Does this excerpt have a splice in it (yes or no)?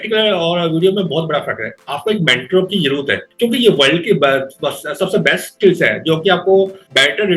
no